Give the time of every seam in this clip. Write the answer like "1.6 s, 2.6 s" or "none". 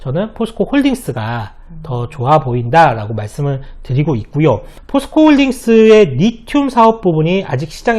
4.7 s